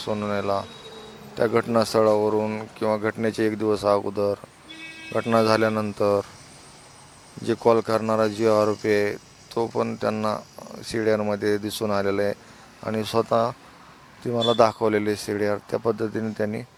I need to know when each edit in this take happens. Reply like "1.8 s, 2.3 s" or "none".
none

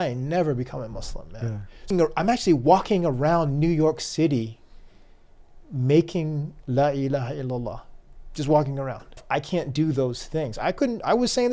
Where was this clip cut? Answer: 1.9 s, 9.2 s

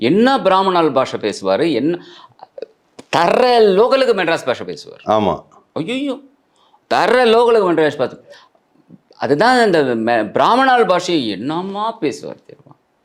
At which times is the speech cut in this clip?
none

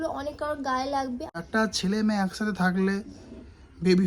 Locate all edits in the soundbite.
1.3 s

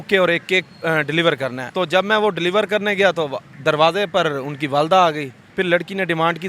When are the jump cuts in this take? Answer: 1.6 s, 3.5 s, 5.4 s

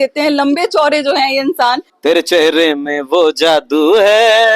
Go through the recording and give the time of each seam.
1.9 s

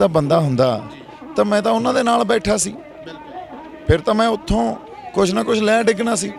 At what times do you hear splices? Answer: none

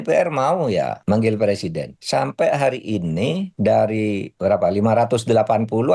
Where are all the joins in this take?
1.0 s, 1.9 s, 3.5 s, 4.3 s

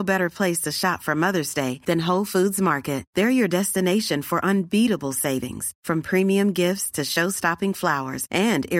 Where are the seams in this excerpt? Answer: none

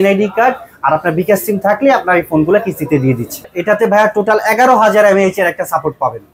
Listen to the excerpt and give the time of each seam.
3.5 s

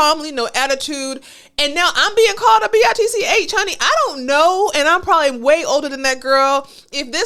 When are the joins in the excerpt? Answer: none

